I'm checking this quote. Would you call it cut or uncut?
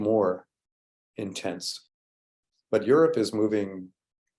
cut